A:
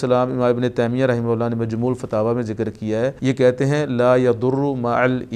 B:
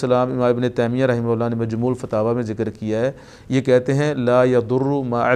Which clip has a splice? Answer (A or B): A